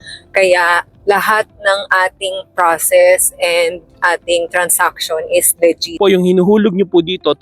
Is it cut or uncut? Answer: cut